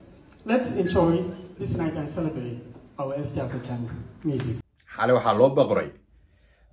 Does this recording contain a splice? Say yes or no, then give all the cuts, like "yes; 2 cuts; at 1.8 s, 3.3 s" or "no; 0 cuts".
yes; 1 cut; at 4.6 s